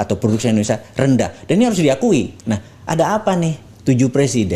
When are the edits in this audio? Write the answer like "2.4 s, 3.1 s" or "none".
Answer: 2.4 s